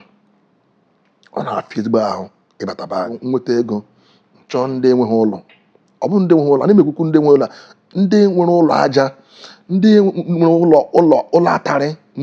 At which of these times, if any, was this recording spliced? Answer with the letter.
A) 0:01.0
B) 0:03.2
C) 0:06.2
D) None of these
B